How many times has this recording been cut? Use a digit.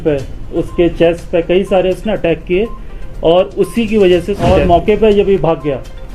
1